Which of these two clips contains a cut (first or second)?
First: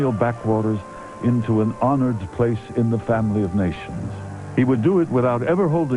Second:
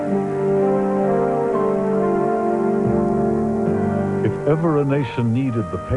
first